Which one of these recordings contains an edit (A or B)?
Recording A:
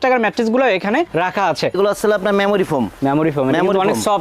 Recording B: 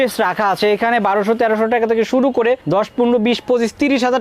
A